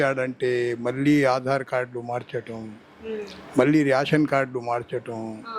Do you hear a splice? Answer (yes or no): no